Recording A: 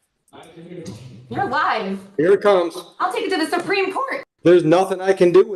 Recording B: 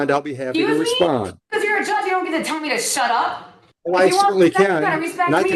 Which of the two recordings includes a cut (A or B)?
A